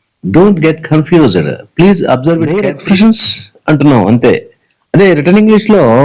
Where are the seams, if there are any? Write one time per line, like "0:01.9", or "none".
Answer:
0:02.6